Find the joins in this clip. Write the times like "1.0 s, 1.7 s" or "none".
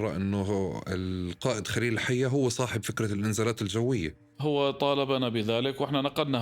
4.2 s